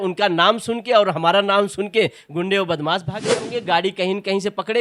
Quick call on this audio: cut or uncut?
cut